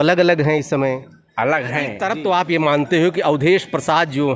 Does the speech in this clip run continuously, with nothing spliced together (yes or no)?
no